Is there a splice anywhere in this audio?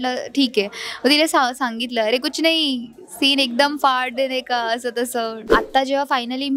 yes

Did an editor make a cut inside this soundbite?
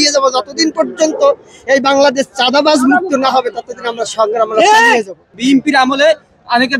yes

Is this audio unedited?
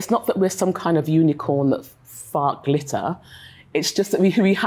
yes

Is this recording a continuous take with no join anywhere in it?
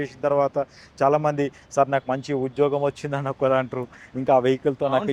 yes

